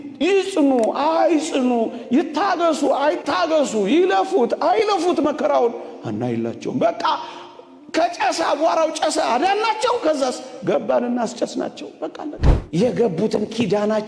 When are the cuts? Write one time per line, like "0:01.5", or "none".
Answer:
0:12.5